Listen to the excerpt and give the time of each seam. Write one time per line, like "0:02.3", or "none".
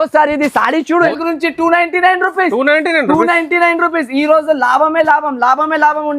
0:01.1